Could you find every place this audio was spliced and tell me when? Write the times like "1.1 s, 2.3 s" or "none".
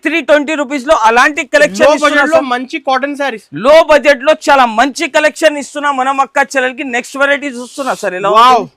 none